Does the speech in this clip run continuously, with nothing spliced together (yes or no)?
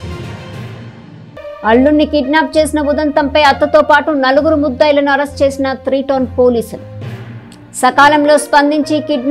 yes